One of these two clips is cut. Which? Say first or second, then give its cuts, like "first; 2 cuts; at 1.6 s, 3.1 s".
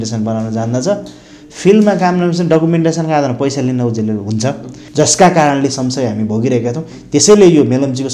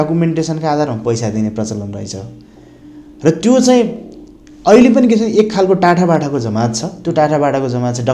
first; 1 cut; at 4.8 s